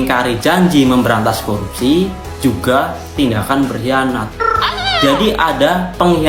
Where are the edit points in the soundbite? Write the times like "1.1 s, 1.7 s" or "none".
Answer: none